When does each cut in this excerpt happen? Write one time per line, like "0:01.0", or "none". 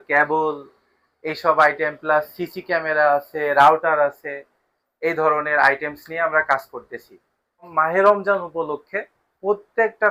0:07.7